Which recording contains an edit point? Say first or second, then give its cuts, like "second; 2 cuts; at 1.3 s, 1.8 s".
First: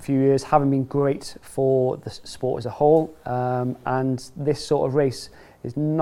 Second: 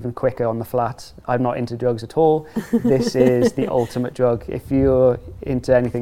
second; 1 cut; at 1.1 s